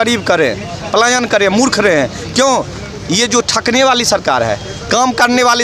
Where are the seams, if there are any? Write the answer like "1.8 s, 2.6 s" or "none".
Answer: none